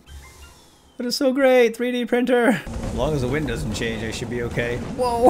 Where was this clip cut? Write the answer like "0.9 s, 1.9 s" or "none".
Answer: 2.8 s